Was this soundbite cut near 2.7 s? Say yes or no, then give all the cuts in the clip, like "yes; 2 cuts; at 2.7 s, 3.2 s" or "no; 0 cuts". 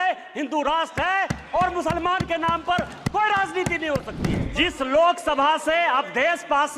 no; 1 cut; at 4.4 s